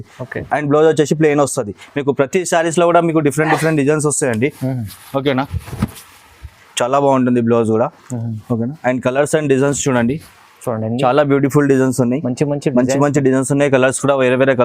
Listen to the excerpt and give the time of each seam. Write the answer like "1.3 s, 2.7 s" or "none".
6.6 s